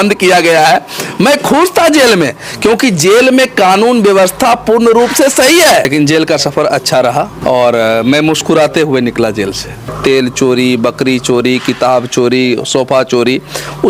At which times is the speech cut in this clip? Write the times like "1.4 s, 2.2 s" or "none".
5.9 s, 7.3 s, 9.9 s